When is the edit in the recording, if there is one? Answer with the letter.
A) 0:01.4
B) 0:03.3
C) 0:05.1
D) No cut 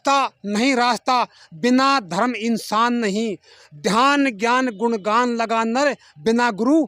D